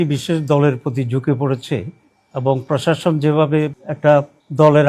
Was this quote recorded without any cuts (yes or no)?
no